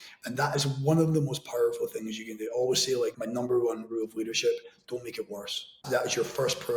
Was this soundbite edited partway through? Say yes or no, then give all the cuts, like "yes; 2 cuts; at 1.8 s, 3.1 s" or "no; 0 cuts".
yes; 1 cut; at 5.8 s